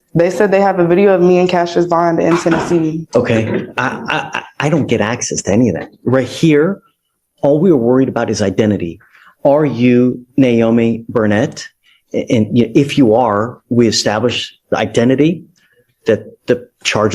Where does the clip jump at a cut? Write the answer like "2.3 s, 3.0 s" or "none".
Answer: 3.0 s